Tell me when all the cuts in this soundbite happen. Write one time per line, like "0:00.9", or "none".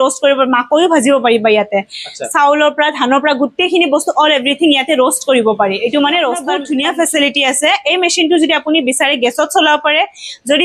0:06.5